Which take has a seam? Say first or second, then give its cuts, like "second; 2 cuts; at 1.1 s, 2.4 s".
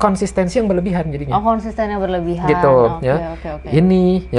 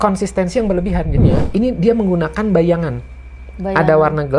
second; 1 cut; at 1.2 s